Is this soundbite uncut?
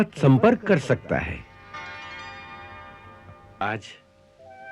no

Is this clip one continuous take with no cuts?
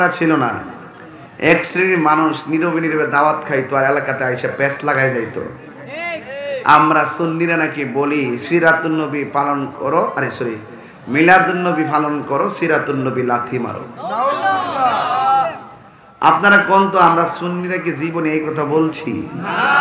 yes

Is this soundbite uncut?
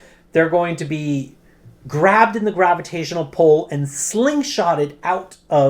yes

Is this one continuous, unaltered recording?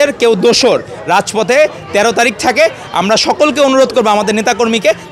yes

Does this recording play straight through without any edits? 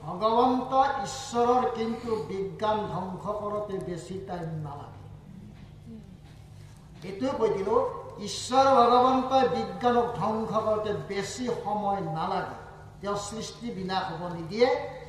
yes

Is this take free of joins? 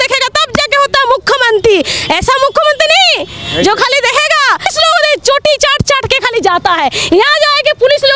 no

